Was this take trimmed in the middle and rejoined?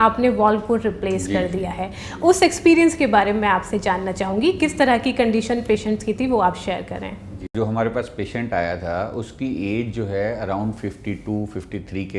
no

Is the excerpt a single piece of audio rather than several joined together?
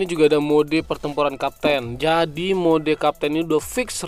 yes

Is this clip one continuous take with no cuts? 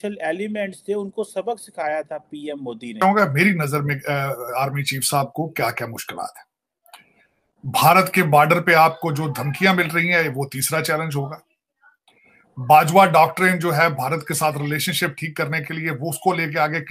no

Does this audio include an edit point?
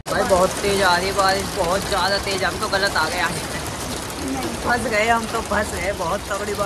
no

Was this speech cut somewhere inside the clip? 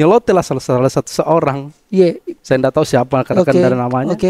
no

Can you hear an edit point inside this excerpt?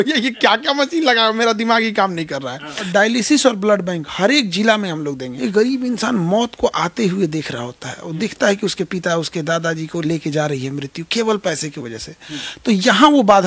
yes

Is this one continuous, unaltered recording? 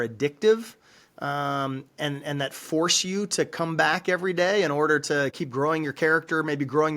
no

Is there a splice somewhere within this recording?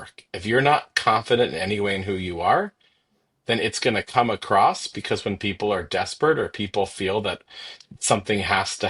no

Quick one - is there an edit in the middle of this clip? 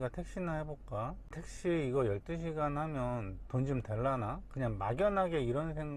yes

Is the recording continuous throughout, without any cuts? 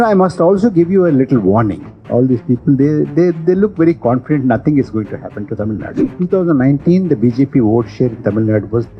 no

